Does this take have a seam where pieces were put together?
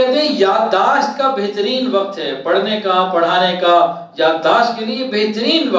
no; 0 cuts

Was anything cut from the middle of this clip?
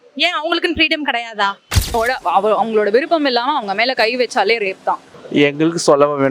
yes; 2 cuts; at 1.9 s, 5.1 s

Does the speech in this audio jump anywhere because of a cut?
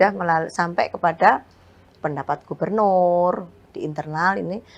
yes; 1 cut; at 3.6 s

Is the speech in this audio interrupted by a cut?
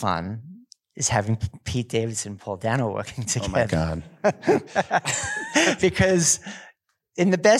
yes; 1 cut; at 4.7 s

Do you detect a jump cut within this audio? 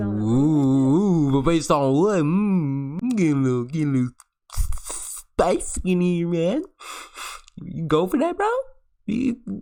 no; 0 cuts

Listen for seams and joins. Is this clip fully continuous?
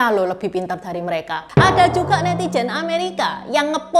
no; 1 cut; at 1.4 s

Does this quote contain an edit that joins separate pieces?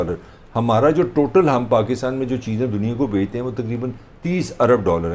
no; 0 cuts

